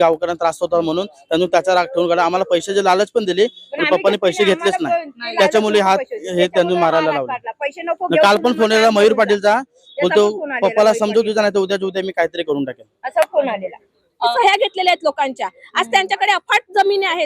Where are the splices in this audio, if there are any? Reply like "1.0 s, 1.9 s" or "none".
14.3 s